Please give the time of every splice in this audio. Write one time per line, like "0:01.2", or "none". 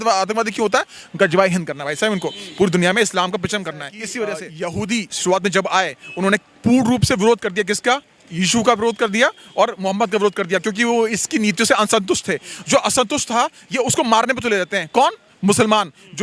0:04.5